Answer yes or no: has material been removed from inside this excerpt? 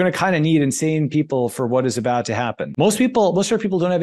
yes